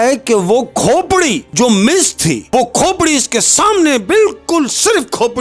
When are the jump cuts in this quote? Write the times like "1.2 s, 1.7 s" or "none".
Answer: 1.4 s, 2.4 s